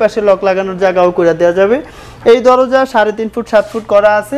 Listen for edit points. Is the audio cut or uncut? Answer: uncut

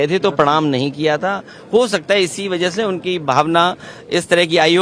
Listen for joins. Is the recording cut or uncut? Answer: uncut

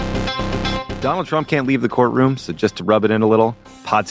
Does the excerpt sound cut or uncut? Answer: cut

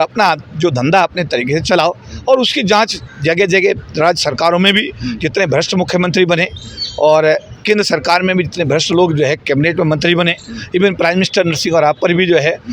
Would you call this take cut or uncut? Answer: uncut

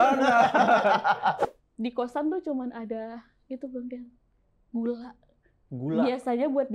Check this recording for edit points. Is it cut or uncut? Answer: cut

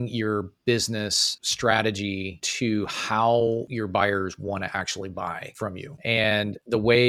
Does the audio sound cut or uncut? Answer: uncut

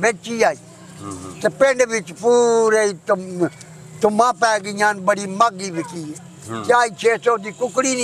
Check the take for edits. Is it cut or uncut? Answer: uncut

